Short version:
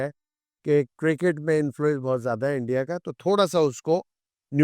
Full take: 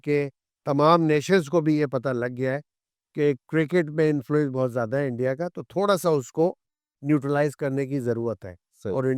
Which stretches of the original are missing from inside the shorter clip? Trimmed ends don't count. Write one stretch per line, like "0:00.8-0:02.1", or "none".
none